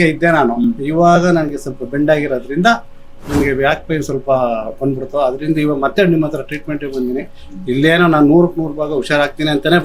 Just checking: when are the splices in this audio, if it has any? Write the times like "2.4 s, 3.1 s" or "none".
none